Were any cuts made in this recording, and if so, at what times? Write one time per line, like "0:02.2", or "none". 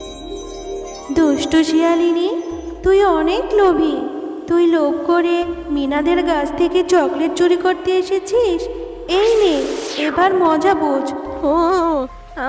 0:01.1